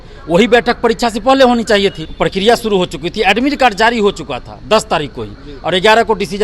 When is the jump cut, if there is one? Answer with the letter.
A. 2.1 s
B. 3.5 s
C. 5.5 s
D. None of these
A